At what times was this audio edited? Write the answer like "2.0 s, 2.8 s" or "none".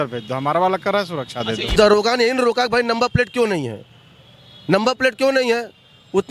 1.7 s